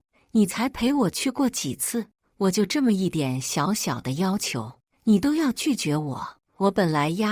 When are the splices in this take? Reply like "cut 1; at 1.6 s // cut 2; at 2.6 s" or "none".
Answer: none